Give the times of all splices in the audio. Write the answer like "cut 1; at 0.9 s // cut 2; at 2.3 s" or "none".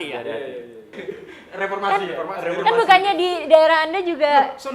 cut 1; at 1.0 s